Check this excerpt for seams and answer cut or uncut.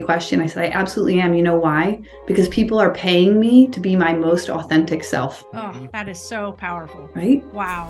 cut